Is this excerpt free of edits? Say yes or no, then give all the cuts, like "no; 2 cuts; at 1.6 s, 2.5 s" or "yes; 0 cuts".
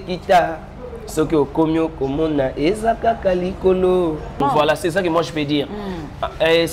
no; 1 cut; at 4.4 s